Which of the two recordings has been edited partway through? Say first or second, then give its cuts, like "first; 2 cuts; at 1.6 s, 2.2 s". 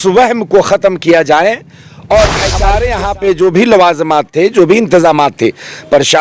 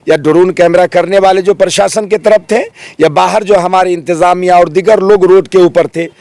first; 1 cut; at 2.6 s